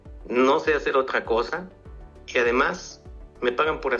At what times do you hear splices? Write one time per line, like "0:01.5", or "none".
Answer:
none